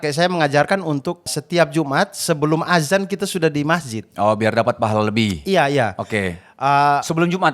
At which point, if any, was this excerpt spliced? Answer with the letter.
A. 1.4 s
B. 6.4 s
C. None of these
A